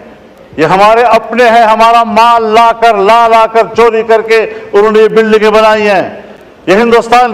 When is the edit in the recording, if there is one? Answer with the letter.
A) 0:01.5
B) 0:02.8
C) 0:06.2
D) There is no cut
D